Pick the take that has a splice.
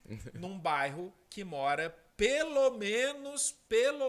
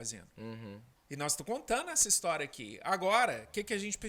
second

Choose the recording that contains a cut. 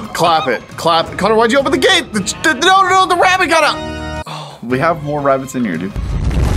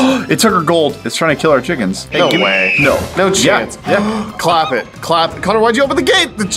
second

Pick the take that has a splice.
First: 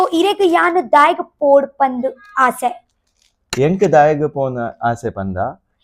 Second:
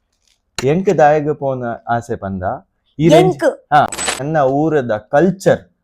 second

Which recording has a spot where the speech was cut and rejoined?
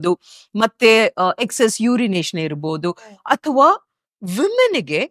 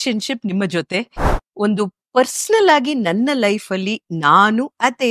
second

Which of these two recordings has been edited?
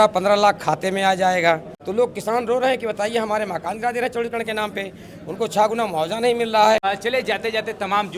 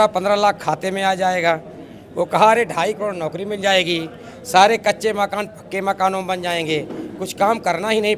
first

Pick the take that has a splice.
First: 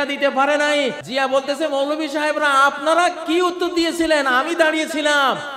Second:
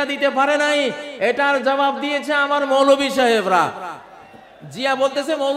first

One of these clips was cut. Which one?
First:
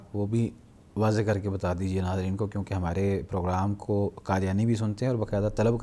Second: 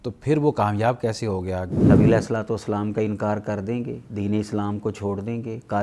second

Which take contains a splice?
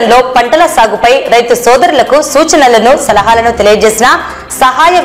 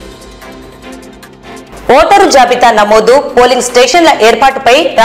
second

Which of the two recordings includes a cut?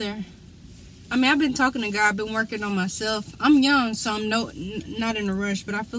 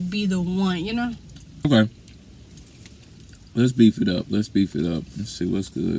second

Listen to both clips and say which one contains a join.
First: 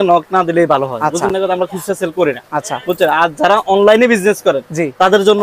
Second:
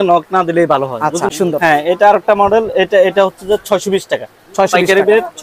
second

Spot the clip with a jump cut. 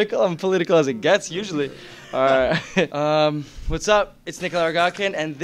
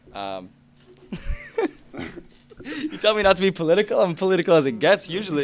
first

